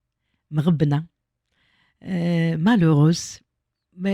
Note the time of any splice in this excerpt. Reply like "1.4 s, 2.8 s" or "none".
none